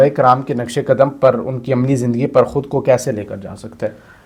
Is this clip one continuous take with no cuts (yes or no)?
yes